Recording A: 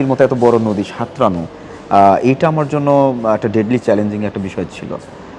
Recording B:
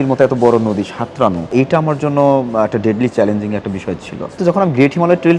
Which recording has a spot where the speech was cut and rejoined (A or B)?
B